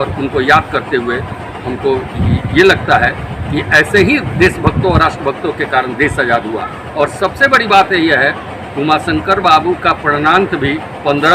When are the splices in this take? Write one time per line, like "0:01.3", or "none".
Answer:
none